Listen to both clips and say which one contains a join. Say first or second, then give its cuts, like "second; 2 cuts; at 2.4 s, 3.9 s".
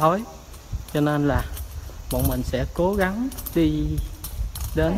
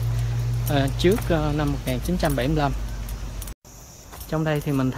second; 1 cut; at 3.6 s